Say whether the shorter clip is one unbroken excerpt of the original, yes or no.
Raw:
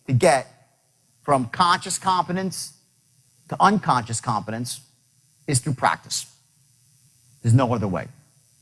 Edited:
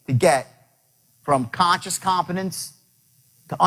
yes